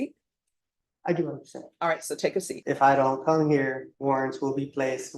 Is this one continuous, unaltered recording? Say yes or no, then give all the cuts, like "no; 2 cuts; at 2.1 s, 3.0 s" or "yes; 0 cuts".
no; 2 cuts; at 2.5 s, 3.9 s